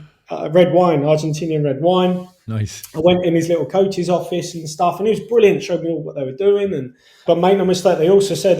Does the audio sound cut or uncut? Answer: cut